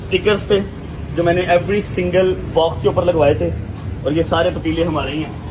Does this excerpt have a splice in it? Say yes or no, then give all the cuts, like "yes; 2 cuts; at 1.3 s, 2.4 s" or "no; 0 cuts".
no; 0 cuts